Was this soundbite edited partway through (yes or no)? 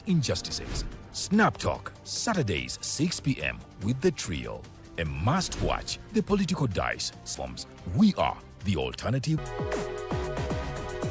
yes